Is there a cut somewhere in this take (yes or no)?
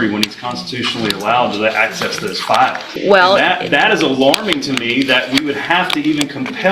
yes